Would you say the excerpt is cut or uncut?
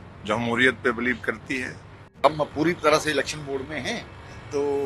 cut